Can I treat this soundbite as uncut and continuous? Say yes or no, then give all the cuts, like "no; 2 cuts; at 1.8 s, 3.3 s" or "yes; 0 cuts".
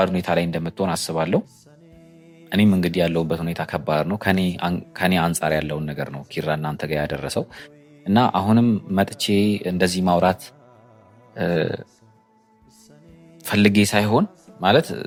yes; 0 cuts